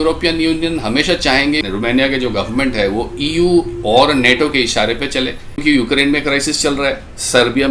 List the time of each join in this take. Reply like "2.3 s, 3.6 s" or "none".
1.6 s, 5.6 s